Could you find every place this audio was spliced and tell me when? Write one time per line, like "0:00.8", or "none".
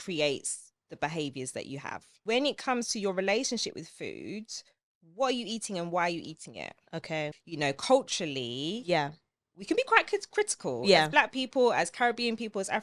0:02.1
0:07.4